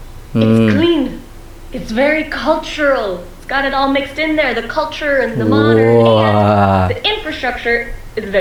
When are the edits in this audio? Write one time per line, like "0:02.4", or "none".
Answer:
none